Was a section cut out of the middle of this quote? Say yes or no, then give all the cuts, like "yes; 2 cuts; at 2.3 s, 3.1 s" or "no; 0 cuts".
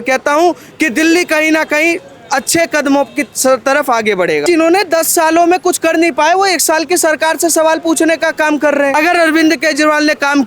yes; 2 cuts; at 4.4 s, 8.9 s